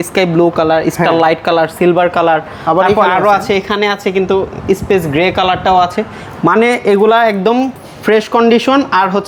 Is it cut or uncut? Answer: uncut